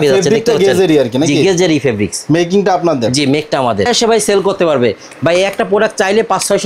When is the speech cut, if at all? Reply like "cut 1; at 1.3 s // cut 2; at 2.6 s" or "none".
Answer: cut 1; at 3.9 s